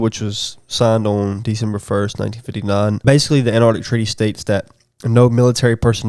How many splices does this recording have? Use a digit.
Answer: 1